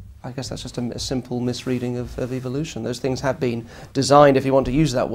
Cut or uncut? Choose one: uncut